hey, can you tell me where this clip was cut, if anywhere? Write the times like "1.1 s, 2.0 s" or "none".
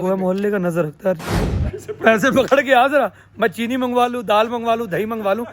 1.4 s